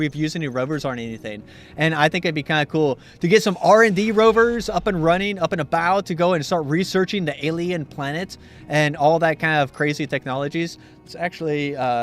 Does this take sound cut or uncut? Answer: cut